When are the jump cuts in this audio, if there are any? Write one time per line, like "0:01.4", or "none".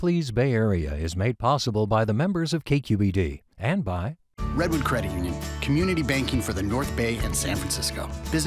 0:04.2